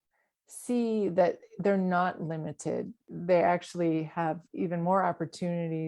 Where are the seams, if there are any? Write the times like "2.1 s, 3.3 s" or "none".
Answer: 3.1 s

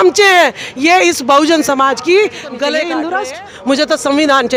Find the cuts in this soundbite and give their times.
3.0 s

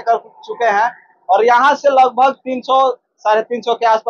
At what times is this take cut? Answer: none

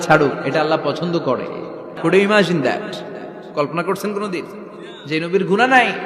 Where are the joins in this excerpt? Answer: 1.9 s

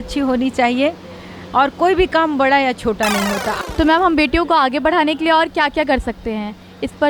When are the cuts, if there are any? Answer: 3.6 s

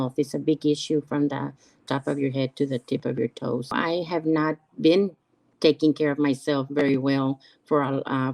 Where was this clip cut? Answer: 3.7 s

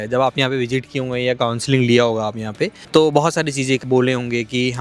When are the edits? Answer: 3.8 s

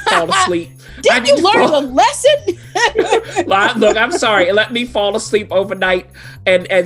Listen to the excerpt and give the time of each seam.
none

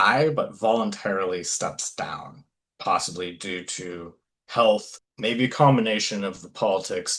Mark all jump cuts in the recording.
5.0 s

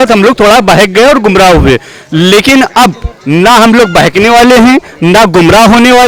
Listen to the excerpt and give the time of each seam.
none

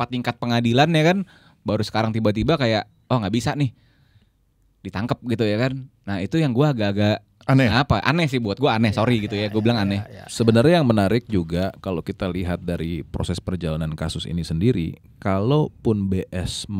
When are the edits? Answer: none

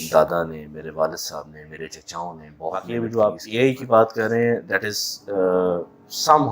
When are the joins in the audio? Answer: 2.9 s

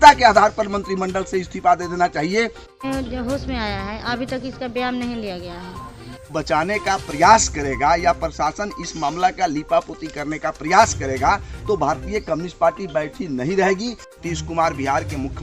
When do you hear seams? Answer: 2.7 s, 6.3 s, 14.1 s

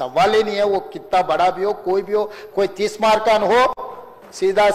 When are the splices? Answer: none

